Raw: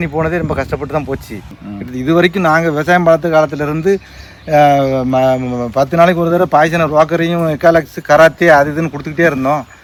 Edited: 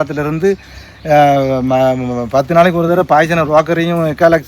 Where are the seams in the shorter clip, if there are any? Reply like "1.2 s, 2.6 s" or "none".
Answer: none

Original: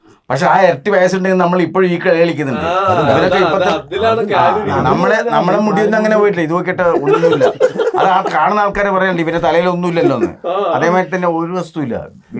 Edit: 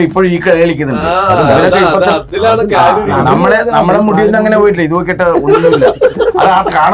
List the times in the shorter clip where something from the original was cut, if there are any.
none

